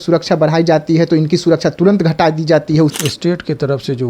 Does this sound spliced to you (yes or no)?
yes